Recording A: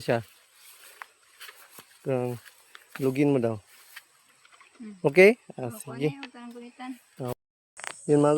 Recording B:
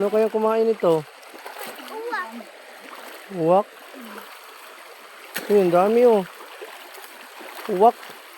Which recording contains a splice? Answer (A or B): A